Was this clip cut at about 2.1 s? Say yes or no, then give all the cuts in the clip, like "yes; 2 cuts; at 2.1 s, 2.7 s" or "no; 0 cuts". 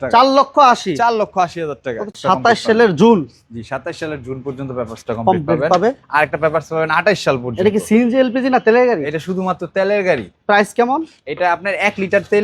yes; 1 cut; at 2.1 s